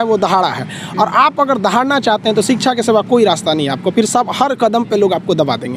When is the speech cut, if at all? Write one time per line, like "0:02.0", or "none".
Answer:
none